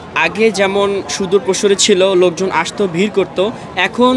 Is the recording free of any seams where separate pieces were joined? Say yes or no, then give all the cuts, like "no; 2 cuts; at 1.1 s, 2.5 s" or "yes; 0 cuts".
yes; 0 cuts